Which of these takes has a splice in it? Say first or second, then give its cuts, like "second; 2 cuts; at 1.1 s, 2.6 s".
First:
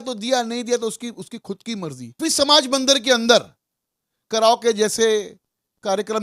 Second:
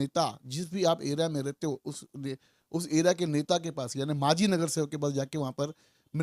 first; 1 cut; at 2.2 s